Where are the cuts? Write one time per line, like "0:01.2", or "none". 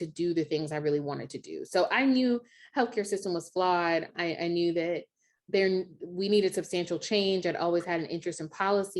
0:04.1
0:05.3